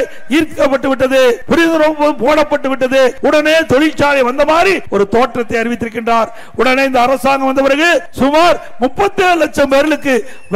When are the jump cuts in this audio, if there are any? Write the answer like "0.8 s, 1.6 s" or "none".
1.4 s, 3.2 s, 4.8 s, 8.1 s